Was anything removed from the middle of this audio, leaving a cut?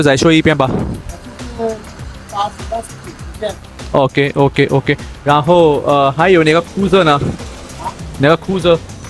no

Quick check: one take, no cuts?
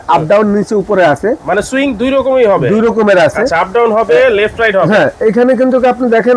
yes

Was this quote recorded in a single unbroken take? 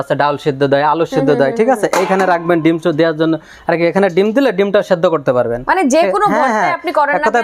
yes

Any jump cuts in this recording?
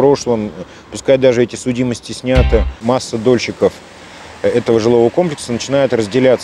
yes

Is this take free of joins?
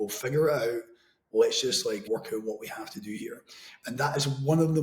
no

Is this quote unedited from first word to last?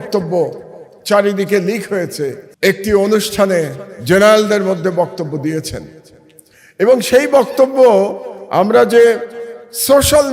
no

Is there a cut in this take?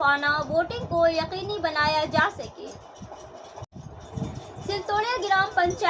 yes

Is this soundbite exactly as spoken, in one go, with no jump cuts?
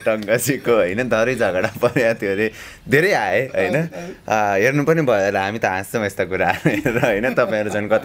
yes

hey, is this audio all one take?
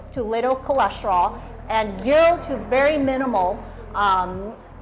yes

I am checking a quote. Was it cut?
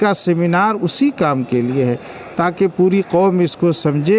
no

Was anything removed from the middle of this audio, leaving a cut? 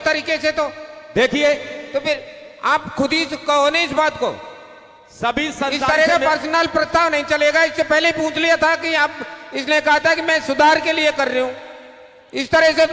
no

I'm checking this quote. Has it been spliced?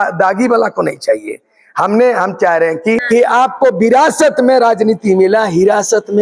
yes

